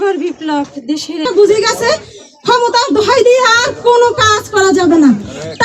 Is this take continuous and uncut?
no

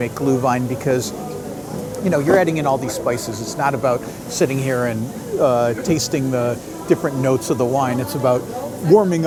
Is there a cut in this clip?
no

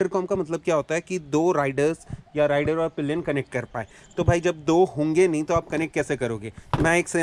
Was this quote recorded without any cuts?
yes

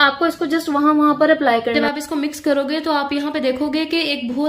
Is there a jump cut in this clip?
yes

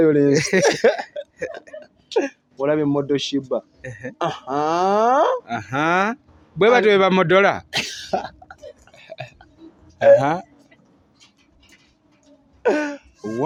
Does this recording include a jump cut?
no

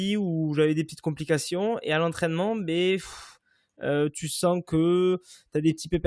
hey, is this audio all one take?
yes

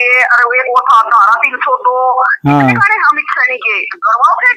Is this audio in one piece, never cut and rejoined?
yes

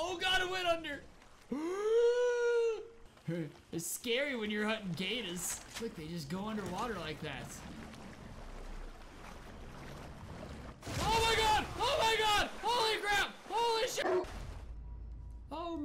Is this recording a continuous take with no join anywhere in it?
no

